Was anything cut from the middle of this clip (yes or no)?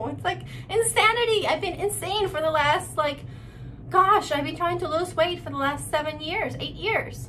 no